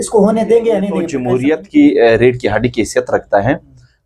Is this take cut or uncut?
cut